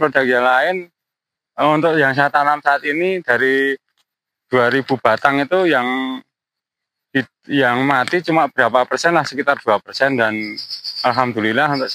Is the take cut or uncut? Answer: uncut